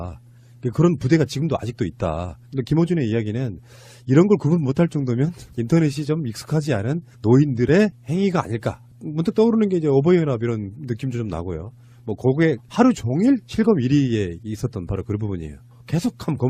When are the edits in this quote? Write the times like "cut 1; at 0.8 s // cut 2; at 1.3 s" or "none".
cut 1; at 3.2 s